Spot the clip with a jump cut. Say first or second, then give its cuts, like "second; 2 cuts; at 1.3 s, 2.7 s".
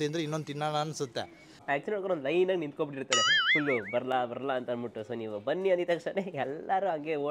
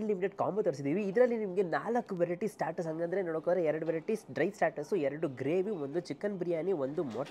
first; 1 cut; at 1.6 s